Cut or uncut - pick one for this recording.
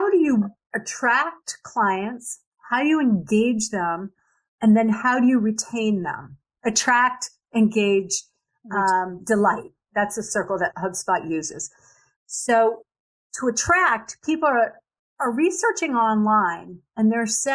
uncut